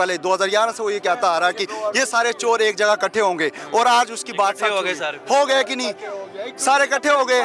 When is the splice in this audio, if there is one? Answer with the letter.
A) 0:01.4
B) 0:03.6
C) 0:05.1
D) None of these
D